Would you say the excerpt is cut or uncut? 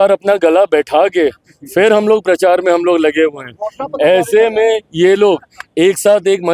uncut